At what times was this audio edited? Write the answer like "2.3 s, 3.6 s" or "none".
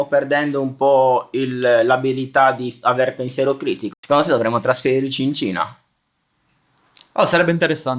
3.9 s